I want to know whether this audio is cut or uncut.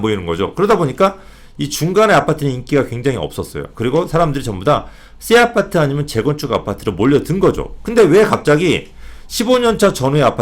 uncut